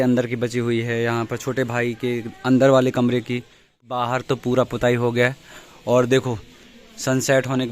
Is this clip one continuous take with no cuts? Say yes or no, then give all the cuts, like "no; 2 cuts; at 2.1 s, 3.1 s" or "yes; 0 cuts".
no; 1 cut; at 3.8 s